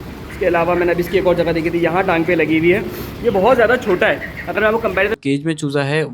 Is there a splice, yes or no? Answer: yes